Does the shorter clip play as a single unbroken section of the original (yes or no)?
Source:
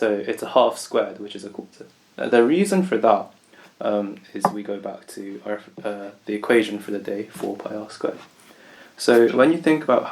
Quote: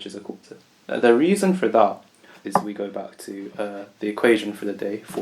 no